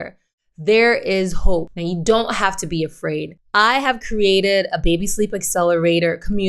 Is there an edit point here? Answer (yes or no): yes